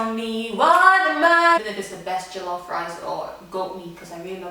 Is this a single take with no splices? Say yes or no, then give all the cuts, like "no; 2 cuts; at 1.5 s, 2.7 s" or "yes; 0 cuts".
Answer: no; 1 cut; at 1.6 s